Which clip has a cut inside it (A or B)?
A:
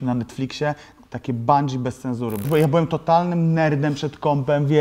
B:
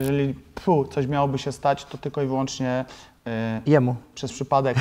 A